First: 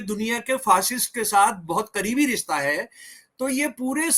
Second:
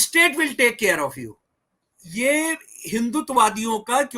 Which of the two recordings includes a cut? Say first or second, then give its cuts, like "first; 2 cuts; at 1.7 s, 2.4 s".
second; 1 cut; at 2.0 s